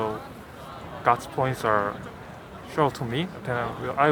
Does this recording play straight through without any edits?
yes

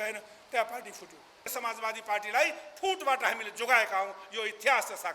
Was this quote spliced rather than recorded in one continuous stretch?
yes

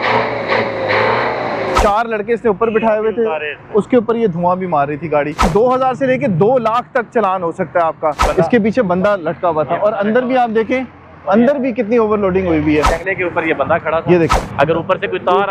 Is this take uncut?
no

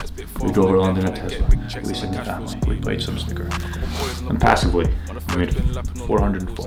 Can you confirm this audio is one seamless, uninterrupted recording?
yes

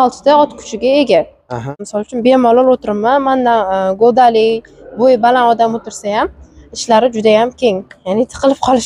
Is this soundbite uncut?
no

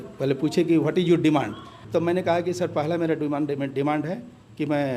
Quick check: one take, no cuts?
no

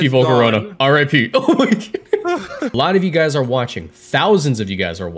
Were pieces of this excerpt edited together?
yes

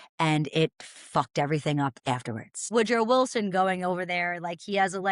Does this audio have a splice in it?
yes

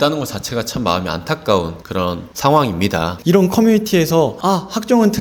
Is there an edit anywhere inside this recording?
yes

